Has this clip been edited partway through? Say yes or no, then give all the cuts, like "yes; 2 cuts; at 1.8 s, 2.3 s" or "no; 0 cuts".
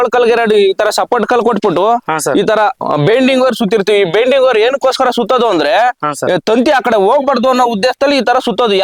no; 0 cuts